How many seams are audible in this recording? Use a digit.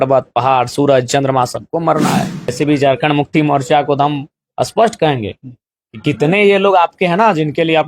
1